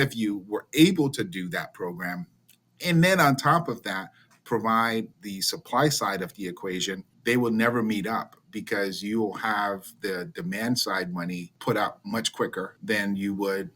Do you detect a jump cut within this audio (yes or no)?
yes